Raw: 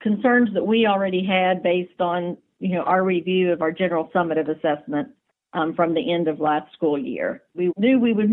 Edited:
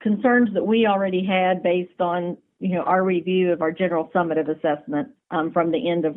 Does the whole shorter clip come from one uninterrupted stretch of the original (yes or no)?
no